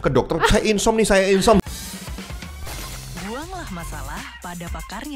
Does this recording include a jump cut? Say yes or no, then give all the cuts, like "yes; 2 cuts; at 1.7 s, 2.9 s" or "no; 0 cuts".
yes; 1 cut; at 1.6 s